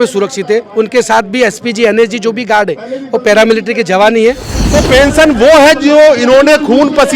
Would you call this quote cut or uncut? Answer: cut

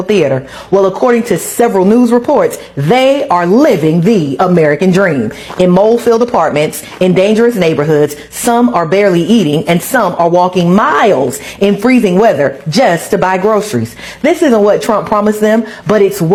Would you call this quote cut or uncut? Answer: uncut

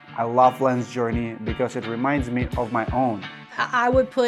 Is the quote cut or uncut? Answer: cut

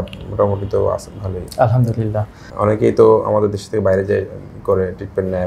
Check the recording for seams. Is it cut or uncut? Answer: cut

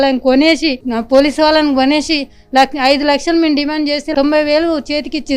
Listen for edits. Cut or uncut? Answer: uncut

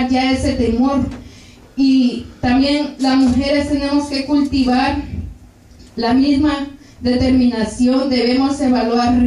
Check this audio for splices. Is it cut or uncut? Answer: uncut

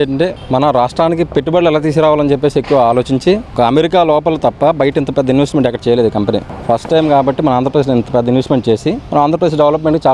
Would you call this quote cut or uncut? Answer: uncut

